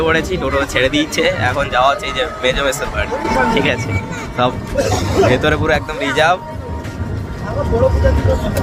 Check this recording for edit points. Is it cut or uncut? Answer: uncut